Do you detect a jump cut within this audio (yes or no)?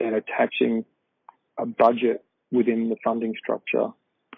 no